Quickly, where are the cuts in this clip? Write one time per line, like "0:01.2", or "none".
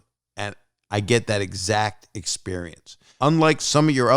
0:03.1